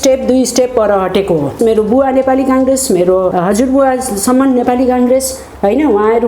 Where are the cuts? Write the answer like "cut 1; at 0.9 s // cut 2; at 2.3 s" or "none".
cut 1; at 1.6 s // cut 2; at 3.3 s

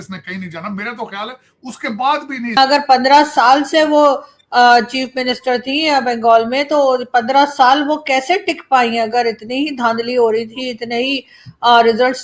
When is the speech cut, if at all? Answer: cut 1; at 2.6 s

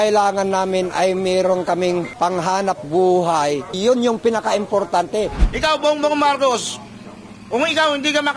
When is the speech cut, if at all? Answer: cut 1; at 2.1 s // cut 2; at 3.8 s // cut 3; at 5.4 s

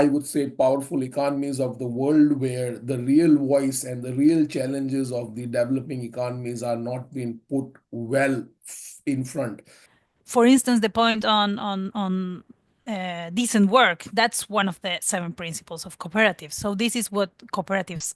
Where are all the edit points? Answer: cut 1; at 9.8 s

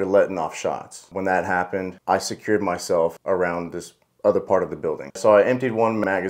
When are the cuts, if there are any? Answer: cut 1; at 5.1 s

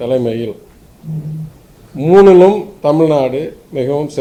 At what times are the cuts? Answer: none

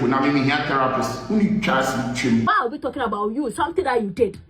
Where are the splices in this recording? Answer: cut 1; at 2.5 s

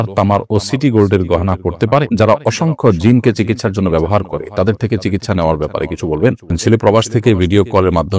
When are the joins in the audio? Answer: cut 1; at 2.1 s // cut 2; at 6.6 s

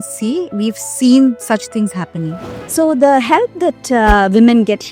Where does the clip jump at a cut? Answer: cut 1; at 2.4 s

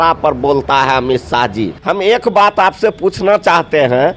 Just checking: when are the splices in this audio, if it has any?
cut 1; at 1.8 s

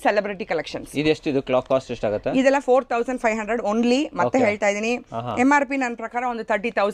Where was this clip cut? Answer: none

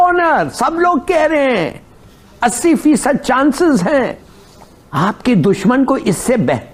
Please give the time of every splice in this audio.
none

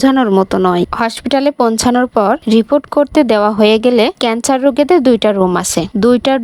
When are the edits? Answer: cut 1; at 0.9 s

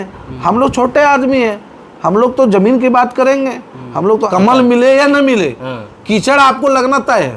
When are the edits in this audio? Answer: cut 1; at 4.3 s

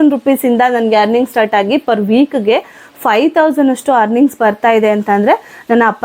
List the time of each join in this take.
none

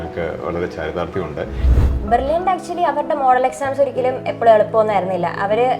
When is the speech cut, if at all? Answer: cut 1; at 1.6 s

